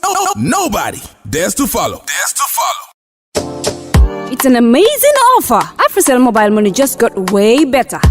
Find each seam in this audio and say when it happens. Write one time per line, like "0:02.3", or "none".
0:02.8

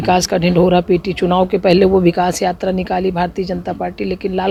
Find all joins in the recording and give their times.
none

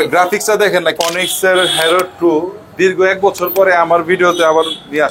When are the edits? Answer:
0:01.0

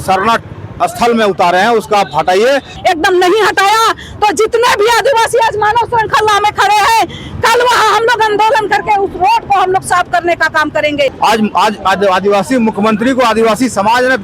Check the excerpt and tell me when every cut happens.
0:02.7
0:11.1

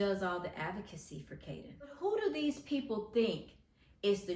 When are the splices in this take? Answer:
0:01.9

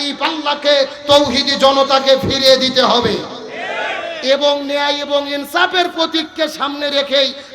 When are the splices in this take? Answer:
none

